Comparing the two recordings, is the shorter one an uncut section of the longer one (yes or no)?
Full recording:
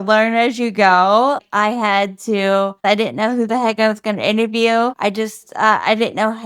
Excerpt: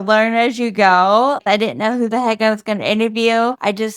no